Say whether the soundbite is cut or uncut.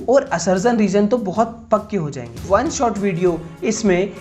cut